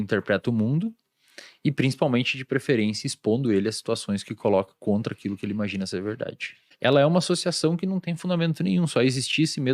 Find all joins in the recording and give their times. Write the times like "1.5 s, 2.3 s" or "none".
6.6 s